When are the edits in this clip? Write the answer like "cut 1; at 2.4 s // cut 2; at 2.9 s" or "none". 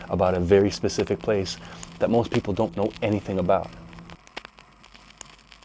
cut 1; at 4.1 s